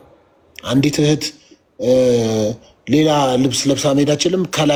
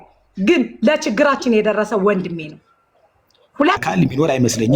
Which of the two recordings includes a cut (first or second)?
second